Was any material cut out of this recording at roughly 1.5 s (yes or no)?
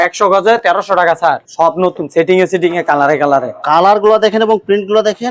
yes